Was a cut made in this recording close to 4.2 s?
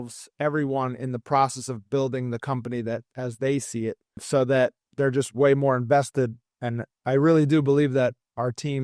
yes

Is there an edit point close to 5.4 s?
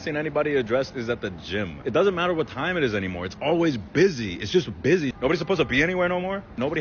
no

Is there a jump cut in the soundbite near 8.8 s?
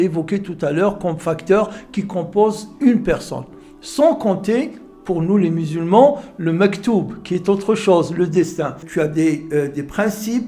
yes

